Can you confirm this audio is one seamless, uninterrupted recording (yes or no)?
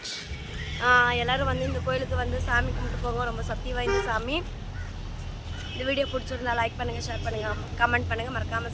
yes